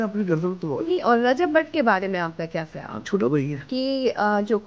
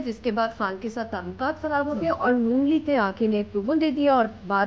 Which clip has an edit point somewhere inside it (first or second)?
first